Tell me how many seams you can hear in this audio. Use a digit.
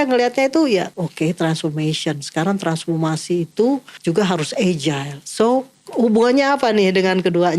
3